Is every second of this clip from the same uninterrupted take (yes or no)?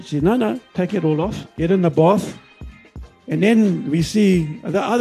no